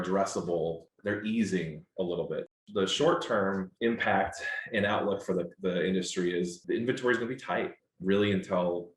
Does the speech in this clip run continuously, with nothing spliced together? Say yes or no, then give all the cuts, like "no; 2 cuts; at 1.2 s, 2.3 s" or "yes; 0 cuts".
no; 5 cuts; at 0.9 s, 2.5 s, 3.7 s, 6.6 s, 7.8 s